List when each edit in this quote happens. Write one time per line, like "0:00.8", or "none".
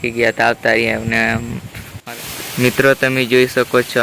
0:02.0